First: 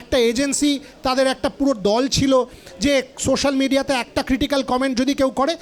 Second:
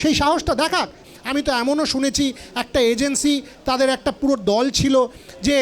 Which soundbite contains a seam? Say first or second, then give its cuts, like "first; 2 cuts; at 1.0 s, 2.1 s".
second; 1 cut; at 1.0 s